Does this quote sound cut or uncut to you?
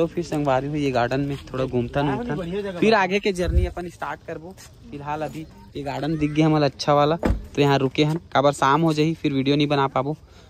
uncut